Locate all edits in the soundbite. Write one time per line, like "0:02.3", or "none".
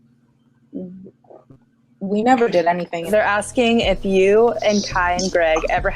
0:03.1